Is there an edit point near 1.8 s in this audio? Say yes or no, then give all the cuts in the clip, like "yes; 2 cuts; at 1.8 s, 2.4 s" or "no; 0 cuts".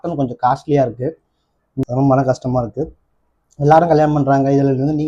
yes; 1 cut; at 1.8 s